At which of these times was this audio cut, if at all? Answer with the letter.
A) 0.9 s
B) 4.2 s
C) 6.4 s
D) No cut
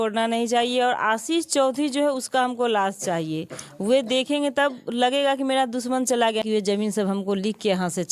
C